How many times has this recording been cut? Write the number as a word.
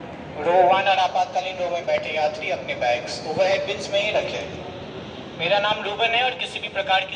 zero